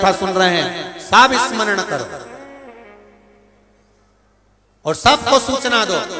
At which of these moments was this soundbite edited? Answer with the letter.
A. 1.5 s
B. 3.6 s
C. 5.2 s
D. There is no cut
D